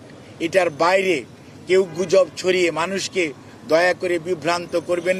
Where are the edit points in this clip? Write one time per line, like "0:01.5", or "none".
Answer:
none